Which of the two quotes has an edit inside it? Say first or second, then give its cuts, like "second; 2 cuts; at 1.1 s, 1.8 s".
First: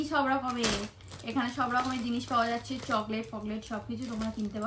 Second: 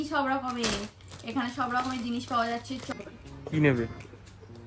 second; 1 cut; at 2.9 s